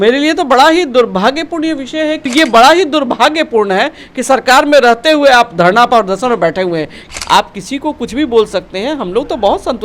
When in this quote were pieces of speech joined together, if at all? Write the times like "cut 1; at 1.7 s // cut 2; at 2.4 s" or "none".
cut 1; at 2.3 s // cut 2; at 7.0 s